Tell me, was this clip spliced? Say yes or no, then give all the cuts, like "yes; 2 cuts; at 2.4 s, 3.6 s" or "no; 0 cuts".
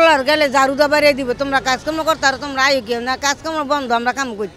no; 0 cuts